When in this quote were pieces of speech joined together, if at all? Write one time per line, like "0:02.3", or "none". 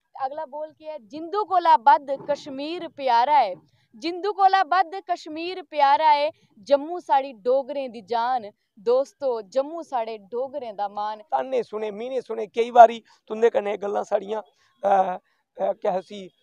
0:11.2